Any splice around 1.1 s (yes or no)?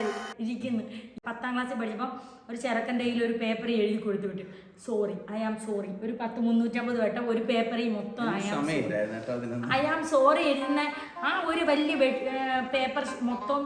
yes